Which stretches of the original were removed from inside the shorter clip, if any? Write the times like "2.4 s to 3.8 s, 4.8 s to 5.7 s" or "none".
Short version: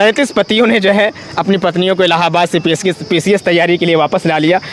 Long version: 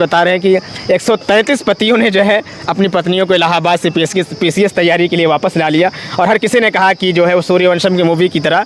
none